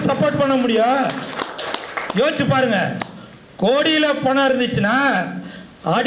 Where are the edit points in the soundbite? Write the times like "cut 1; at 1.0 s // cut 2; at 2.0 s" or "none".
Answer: none